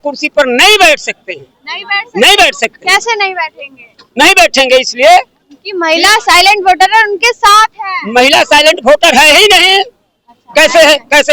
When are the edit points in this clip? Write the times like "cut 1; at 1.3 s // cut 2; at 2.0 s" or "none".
none